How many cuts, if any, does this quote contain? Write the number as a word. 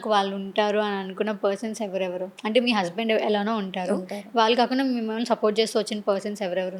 zero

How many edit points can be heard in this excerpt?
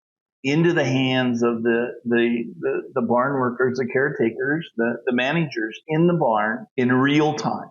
one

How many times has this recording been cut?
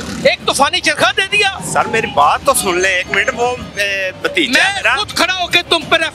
zero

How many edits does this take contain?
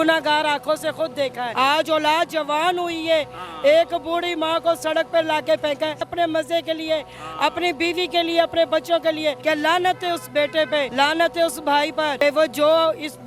five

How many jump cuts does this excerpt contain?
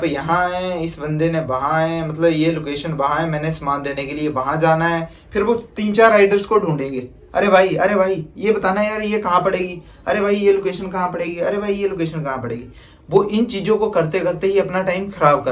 zero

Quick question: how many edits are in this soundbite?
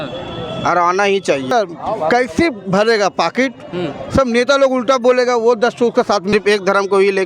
two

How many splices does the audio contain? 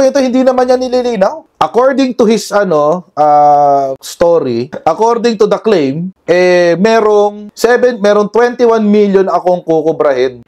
one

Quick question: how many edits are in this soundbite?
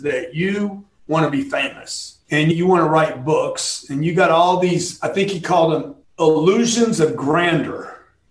two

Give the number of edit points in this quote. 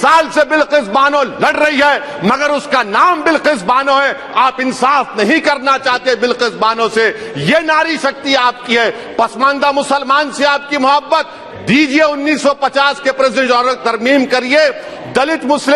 zero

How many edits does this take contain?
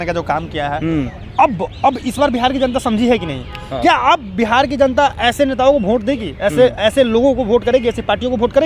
zero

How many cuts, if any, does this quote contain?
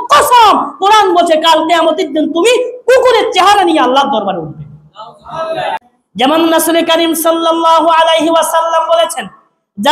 one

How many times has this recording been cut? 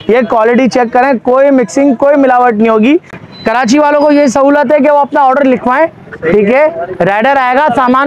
one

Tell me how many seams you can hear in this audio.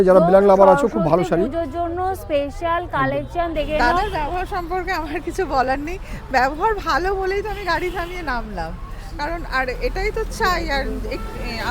one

